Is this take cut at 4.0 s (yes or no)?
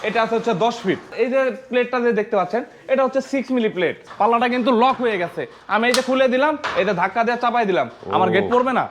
yes